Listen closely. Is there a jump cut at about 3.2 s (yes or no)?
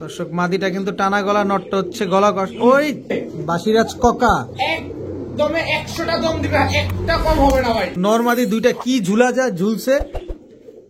yes